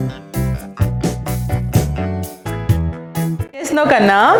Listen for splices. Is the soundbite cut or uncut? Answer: uncut